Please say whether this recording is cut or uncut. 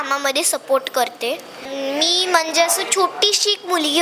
cut